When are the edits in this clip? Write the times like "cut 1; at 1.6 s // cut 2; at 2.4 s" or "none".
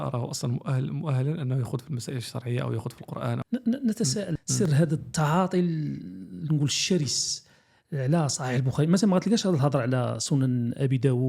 cut 1; at 3.4 s // cut 2; at 4.4 s